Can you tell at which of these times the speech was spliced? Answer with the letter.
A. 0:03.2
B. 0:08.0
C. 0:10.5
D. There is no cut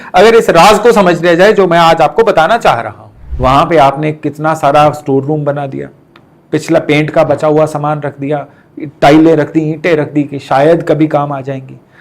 A